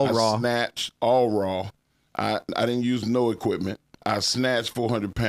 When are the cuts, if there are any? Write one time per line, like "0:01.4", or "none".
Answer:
0:04.0